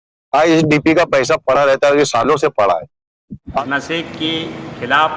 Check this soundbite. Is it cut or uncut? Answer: cut